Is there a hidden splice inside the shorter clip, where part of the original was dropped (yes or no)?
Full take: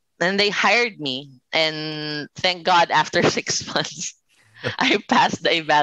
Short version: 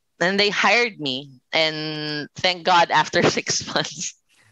no